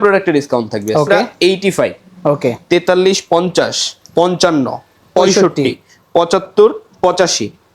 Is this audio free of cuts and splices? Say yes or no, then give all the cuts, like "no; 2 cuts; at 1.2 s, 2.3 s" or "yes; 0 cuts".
no; 1 cut; at 1.2 s